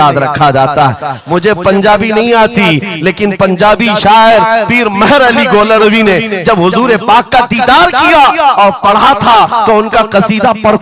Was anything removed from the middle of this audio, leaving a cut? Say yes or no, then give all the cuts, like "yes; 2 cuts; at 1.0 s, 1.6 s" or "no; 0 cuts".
no; 0 cuts